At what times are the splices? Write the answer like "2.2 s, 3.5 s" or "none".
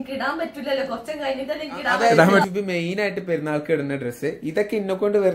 2.4 s